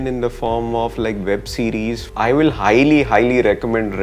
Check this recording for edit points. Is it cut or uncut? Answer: cut